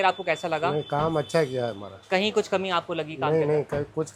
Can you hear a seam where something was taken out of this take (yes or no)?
no